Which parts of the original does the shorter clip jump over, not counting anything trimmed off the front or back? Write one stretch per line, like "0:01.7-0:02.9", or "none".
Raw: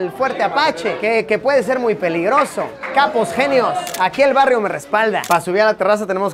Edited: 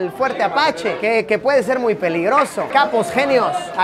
0:02.6-0:02.8